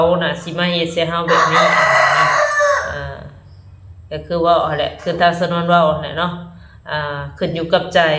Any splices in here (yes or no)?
no